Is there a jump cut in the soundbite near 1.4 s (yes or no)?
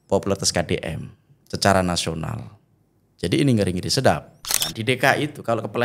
no